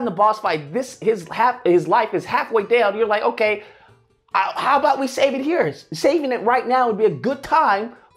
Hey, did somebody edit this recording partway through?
no; 0 cuts

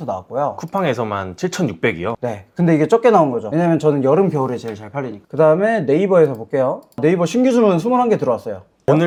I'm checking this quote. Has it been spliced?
no; 0 cuts

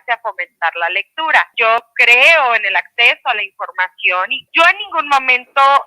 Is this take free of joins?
no; 2 cuts; at 1.5 s, 4.4 s

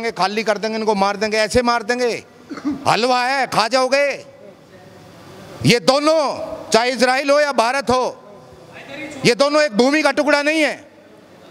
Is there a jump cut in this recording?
no; 0 cuts

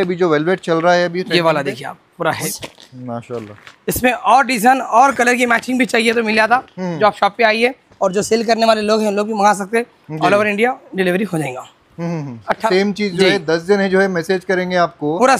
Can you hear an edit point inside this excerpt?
yes; 2 cuts; at 2.4 s, 12.7 s

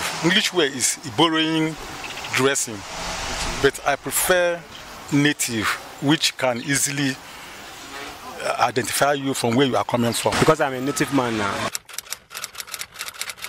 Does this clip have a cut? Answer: yes; 2 cuts; at 10.3 s, 11.7 s

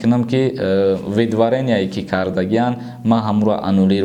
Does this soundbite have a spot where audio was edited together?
no; 0 cuts

